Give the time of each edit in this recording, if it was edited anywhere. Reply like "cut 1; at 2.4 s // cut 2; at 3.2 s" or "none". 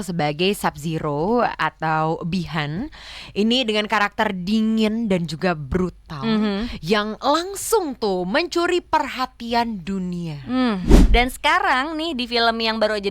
cut 1; at 10.9 s